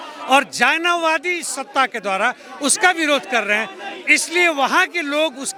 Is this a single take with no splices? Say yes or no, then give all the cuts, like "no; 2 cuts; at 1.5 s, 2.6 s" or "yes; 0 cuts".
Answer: yes; 0 cuts